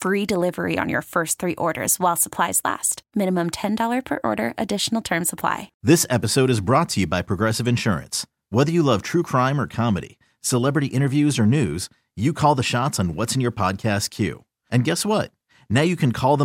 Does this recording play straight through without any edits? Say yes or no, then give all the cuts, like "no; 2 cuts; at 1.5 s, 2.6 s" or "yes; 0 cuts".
no; 1 cut; at 5.7 s